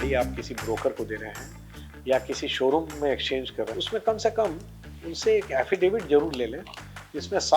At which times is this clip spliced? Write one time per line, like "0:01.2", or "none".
0:03.8